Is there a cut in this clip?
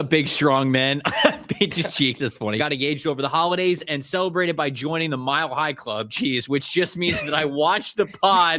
yes; 1 cut; at 2.6 s

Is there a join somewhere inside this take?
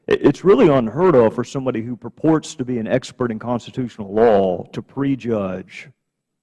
yes; 1 cut; at 4.8 s

